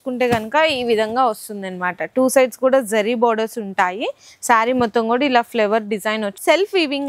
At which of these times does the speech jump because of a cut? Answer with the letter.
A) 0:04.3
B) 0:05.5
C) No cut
C